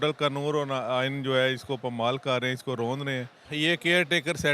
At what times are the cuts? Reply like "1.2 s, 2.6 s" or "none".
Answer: 3.4 s